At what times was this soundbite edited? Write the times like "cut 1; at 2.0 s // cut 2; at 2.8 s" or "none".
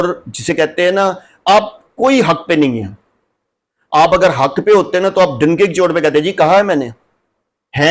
none